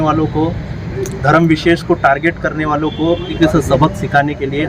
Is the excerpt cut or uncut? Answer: cut